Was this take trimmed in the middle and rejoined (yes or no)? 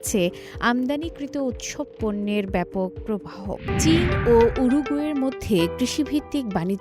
yes